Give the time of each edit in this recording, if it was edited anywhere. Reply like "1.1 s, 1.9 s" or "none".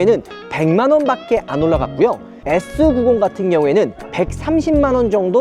2.3 s